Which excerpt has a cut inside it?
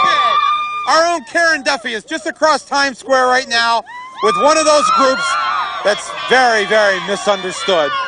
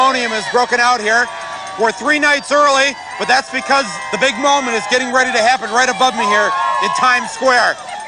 first; 1 cut; at 7.0 s

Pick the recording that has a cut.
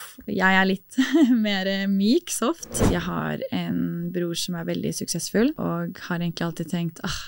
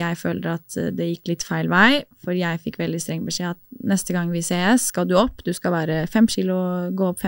first; 2 cuts; at 2.7 s, 5.6 s

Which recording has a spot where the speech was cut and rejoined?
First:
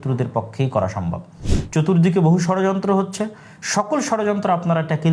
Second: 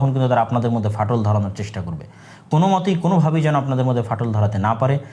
first; 1 cut; at 1.5 s

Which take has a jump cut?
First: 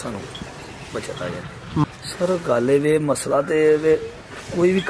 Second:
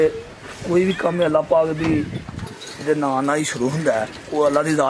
first; 1 cut; at 1.8 s

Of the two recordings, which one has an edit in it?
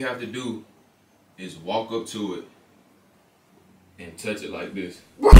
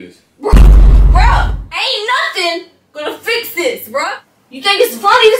second; 2 cuts; at 1.7 s, 4.2 s

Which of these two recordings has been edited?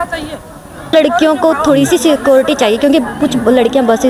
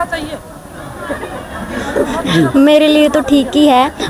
first; 1 cut; at 0.9 s

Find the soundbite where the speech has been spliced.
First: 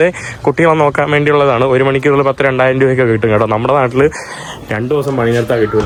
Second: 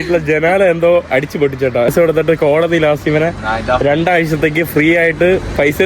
second; 1 cut; at 1.9 s

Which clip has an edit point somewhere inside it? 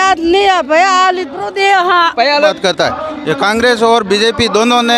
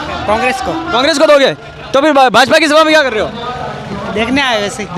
first; 1 cut; at 2.5 s

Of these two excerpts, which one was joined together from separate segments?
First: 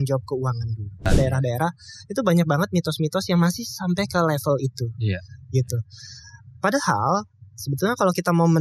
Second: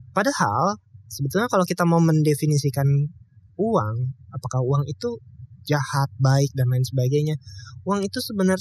first; 1 cut; at 1.1 s

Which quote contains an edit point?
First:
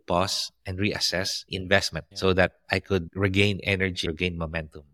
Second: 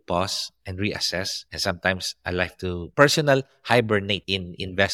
first; 2 cuts; at 1.5 s, 4.0 s

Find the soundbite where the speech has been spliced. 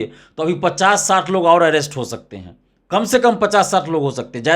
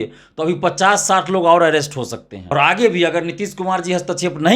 second; 1 cut; at 2.3 s

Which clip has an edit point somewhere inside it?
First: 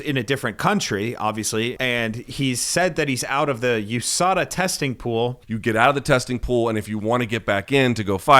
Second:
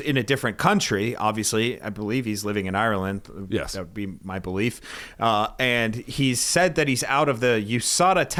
first; 2 cuts; at 1.8 s, 5.5 s

